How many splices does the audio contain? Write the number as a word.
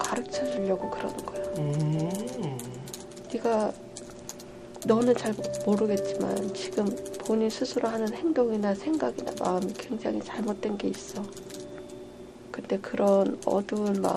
one